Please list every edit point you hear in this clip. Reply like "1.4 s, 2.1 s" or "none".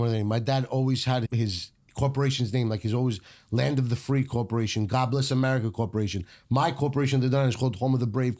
1.2 s